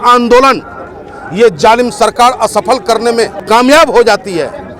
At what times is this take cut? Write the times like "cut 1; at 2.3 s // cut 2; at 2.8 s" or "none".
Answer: cut 1; at 3.4 s